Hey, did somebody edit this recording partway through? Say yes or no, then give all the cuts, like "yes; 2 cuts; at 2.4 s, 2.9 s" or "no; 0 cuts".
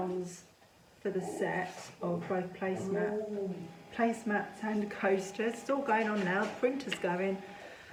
no; 0 cuts